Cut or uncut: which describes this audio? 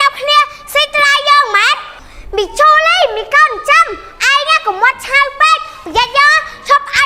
uncut